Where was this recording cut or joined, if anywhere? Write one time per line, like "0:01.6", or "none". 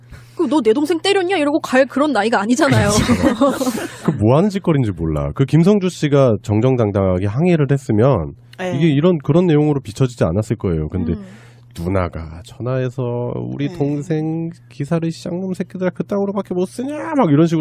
none